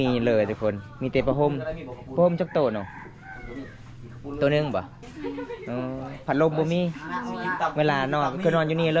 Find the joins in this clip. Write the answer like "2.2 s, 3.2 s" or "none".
5.0 s